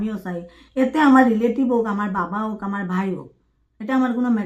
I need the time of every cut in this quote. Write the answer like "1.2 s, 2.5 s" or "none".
none